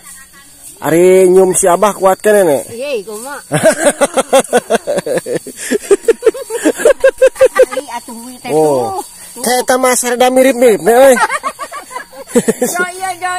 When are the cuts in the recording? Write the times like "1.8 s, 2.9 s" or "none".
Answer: 7.7 s